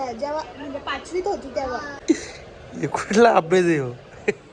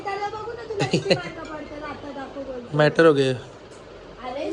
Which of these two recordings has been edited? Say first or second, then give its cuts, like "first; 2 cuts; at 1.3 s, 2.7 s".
first; 1 cut; at 1.9 s